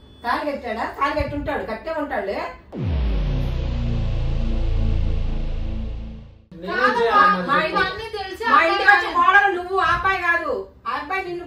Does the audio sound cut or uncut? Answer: cut